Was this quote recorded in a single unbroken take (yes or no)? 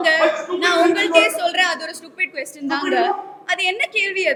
yes